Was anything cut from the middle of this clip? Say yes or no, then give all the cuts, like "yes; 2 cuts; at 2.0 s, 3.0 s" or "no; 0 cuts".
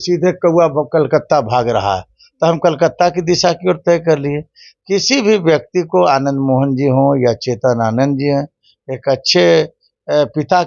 no; 0 cuts